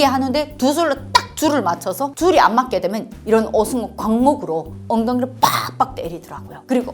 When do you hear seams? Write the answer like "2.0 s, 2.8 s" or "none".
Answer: 2.1 s

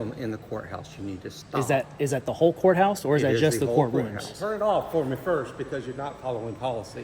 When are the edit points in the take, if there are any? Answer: 4.4 s

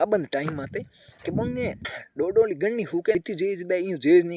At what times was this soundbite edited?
2.0 s, 3.2 s

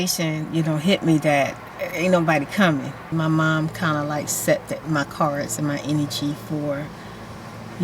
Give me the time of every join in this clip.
3.1 s

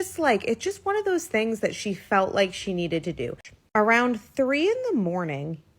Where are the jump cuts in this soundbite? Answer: 3.5 s

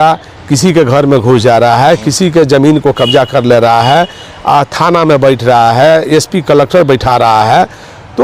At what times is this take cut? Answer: none

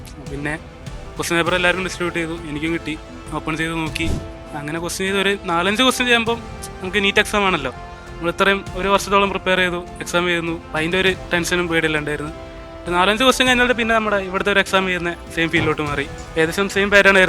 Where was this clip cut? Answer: 4.4 s, 16.2 s

